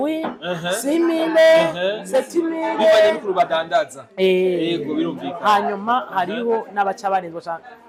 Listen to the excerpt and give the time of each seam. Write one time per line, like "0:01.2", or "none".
none